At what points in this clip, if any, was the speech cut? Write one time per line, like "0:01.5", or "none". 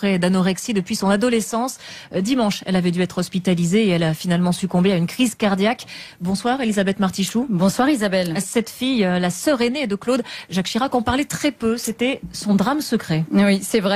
0:12.7